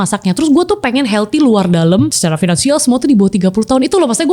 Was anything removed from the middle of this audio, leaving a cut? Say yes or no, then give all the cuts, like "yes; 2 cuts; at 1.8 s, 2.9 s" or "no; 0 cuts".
yes; 1 cut; at 2.2 s